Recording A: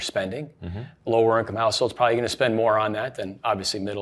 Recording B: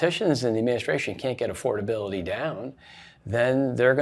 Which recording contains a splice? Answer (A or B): A